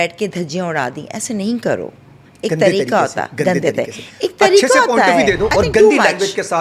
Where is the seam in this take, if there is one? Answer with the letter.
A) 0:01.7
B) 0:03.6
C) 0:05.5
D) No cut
C